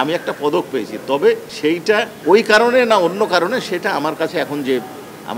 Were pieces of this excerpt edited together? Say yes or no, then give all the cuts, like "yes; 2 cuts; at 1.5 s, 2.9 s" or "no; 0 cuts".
yes; 1 cut; at 1.5 s